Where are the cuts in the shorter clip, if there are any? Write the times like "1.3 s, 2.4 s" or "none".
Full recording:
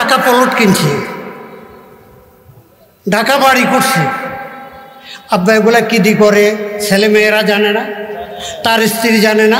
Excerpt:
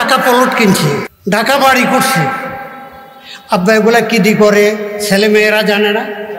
1.1 s